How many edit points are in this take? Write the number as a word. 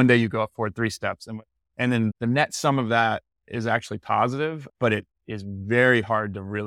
two